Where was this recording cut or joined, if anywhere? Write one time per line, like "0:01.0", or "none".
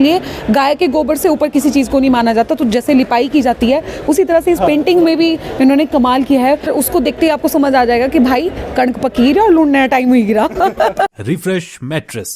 0:06.7
0:11.1